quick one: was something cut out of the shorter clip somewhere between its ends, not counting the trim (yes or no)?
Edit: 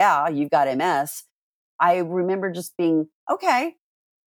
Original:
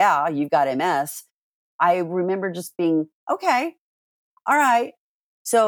no